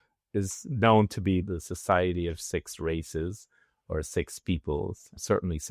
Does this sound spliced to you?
no; 0 cuts

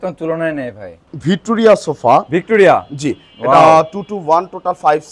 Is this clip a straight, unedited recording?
no; 1 cut; at 1.1 s

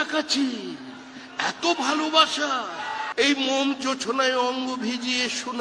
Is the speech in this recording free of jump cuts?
no; 1 cut; at 3.1 s

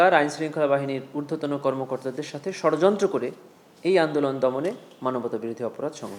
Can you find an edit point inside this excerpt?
no; 0 cuts

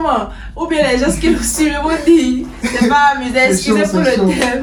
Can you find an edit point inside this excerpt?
no; 0 cuts

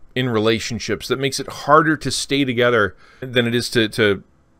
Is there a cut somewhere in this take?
yes; 1 cut; at 3.2 s

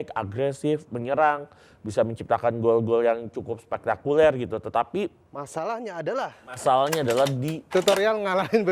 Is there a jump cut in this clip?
yes; 1 cut; at 7.7 s

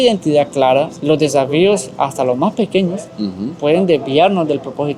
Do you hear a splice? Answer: yes; 1 cut; at 0.9 s

